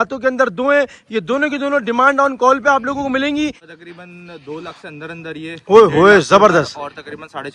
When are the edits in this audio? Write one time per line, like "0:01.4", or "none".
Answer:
0:03.6